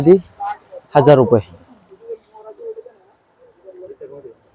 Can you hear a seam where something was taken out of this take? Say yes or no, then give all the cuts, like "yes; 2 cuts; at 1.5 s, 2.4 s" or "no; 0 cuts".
no; 0 cuts